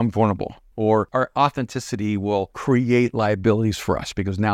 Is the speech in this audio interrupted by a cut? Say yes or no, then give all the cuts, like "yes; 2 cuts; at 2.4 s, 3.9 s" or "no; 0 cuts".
yes; 2 cuts; at 0.9 s, 2.6 s